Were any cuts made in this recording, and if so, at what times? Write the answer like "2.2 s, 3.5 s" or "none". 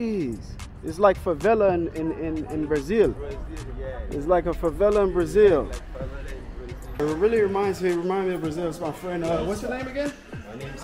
7.0 s